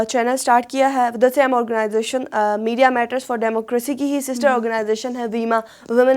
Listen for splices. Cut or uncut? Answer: uncut